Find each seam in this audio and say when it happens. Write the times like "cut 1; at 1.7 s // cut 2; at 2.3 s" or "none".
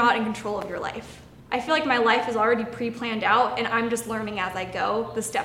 cut 1; at 1.3 s